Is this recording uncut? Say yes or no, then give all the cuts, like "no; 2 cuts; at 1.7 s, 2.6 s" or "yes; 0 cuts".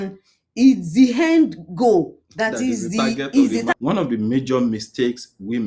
no; 1 cut; at 3.7 s